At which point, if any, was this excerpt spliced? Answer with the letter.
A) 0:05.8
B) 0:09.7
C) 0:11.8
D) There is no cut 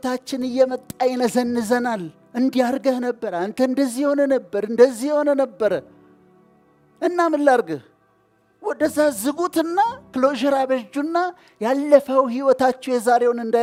D